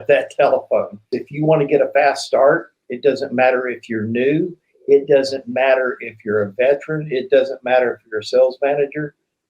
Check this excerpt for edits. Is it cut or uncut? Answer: cut